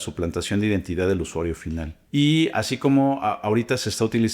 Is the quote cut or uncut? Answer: cut